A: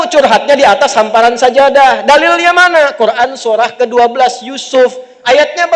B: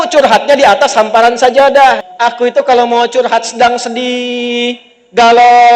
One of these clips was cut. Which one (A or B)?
B